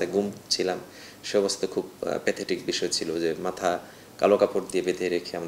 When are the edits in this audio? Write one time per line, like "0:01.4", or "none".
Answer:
none